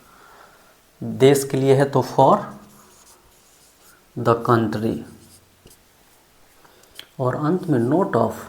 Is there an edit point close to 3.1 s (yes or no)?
no